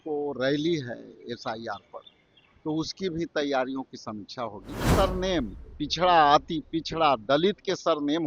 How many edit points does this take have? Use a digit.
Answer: 1